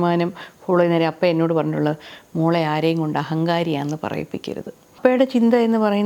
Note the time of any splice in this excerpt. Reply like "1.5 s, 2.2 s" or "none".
5.0 s